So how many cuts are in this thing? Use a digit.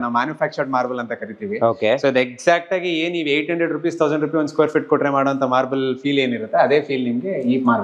0